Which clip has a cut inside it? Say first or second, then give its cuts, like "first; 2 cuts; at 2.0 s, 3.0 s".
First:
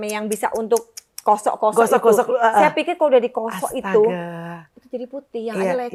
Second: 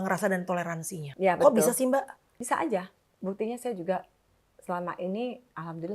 second; 2 cuts; at 1.0 s, 2.3 s